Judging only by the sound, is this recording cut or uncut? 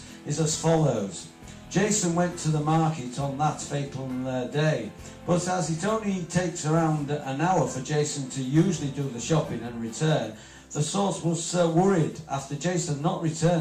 cut